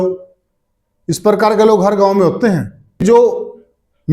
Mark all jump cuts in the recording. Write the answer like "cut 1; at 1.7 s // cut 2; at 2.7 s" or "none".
cut 1; at 3.0 s